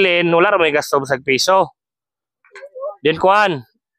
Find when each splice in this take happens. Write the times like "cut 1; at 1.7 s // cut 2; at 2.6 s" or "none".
none